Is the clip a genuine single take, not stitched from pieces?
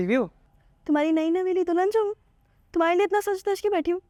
yes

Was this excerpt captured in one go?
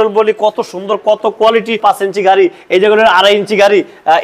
no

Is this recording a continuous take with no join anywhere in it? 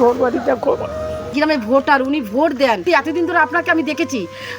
no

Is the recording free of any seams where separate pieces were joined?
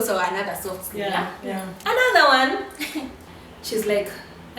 no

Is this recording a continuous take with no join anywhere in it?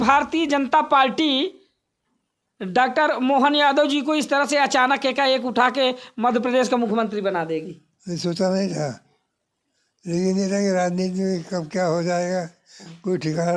yes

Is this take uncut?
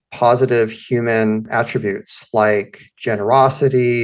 no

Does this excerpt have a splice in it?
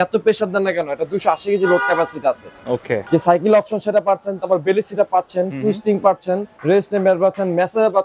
yes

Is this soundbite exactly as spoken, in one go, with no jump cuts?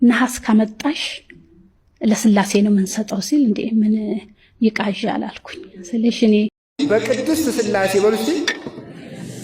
no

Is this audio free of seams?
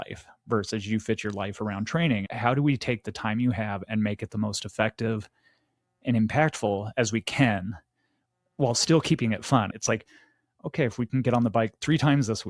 no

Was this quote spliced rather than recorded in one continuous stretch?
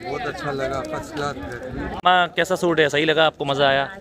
yes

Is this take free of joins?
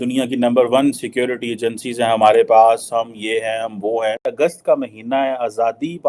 no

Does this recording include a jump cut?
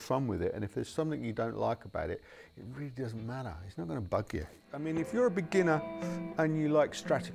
yes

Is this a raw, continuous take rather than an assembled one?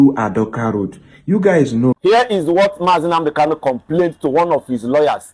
no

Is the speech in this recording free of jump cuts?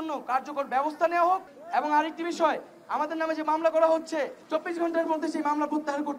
no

